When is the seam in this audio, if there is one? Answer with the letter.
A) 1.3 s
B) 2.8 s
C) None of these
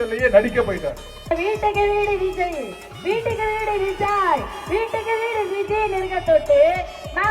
A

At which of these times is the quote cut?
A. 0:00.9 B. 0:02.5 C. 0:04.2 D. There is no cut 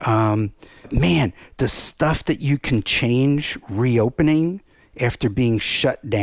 A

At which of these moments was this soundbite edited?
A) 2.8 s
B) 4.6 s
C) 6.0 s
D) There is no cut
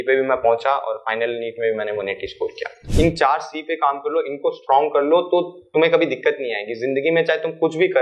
A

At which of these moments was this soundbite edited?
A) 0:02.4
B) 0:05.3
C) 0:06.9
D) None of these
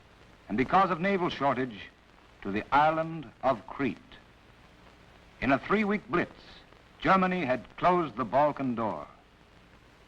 A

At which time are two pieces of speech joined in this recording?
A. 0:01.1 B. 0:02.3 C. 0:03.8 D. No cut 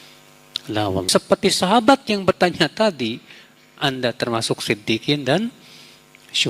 A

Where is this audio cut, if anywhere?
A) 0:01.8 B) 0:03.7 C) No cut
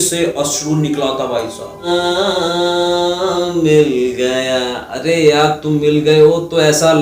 A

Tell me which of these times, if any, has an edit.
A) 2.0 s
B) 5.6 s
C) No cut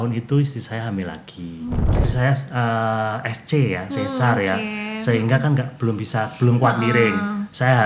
A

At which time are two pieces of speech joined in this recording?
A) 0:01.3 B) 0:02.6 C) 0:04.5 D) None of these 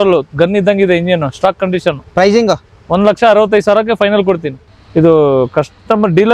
C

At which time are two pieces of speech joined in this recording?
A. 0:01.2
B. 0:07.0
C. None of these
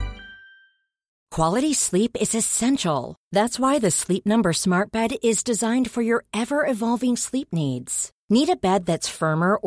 A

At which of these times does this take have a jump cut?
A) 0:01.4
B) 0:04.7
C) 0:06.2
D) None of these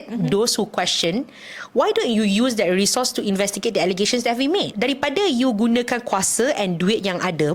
B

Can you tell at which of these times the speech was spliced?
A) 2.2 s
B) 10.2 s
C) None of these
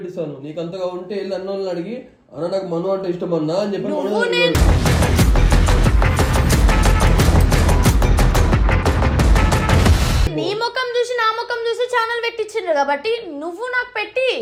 C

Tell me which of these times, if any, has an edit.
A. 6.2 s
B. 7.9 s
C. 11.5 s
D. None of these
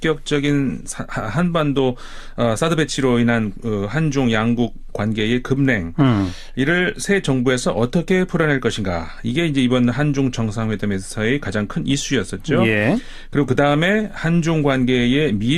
A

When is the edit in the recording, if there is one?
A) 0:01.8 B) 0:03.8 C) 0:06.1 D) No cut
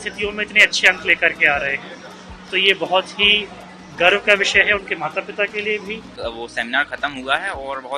C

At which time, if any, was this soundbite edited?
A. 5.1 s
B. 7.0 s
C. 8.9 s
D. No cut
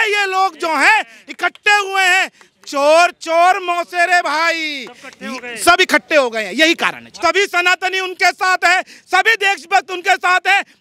B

